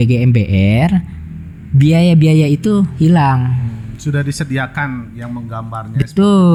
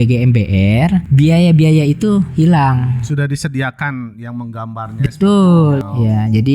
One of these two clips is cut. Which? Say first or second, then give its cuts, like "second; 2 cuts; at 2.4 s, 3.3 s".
second; 3 cuts; at 1.1 s, 3.0 s, 5.8 s